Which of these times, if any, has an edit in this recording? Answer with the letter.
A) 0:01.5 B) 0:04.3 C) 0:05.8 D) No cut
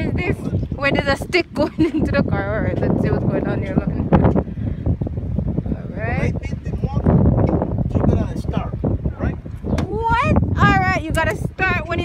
D